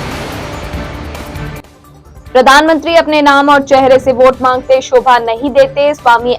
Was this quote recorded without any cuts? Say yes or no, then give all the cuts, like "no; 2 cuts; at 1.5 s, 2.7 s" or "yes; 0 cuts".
no; 1 cut; at 1.7 s